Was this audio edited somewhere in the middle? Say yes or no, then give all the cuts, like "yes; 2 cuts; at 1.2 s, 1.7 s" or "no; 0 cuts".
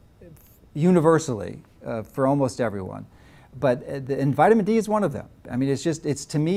no; 0 cuts